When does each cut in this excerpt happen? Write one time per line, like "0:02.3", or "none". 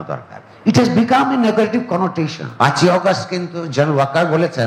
0:02.4